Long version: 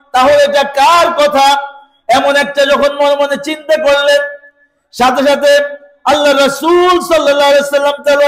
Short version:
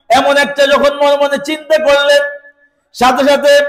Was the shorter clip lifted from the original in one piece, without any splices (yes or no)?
yes